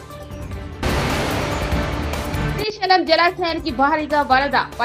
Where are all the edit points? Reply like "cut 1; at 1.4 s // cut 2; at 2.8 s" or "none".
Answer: none